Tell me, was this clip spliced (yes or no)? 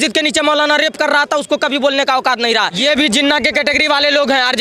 yes